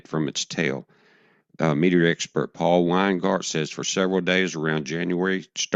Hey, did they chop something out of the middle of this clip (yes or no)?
no